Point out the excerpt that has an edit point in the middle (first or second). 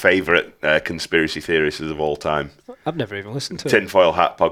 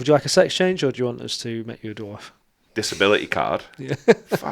second